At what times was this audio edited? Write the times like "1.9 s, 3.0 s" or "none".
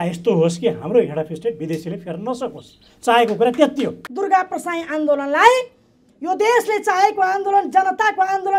4.0 s